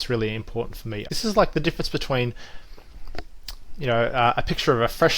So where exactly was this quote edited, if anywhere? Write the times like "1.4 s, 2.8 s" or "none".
1.1 s